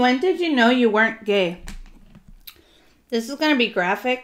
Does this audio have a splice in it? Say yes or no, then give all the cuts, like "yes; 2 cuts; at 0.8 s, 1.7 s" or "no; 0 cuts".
no; 0 cuts